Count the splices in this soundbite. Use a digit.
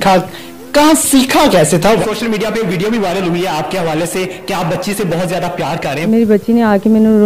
2